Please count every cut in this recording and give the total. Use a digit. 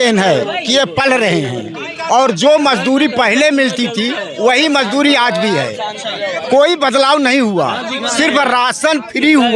0